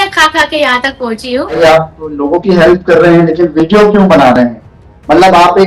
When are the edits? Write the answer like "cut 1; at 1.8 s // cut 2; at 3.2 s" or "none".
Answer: cut 1; at 1.6 s